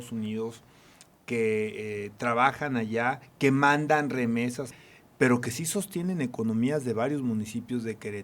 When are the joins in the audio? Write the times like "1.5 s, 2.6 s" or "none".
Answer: 4.8 s